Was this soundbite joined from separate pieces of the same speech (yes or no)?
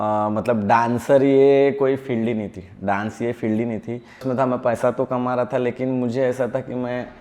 yes